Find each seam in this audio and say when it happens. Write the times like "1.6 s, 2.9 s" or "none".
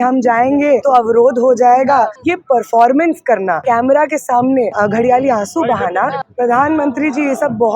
0.8 s, 2.2 s, 3.6 s, 4.7 s, 6.2 s